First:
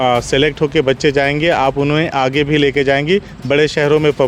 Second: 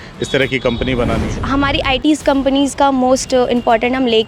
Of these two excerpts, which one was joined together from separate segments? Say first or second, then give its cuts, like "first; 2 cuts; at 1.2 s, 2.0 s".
second; 1 cut; at 1.3 s